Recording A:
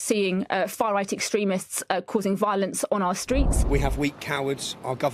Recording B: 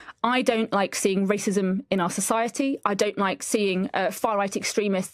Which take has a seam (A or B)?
A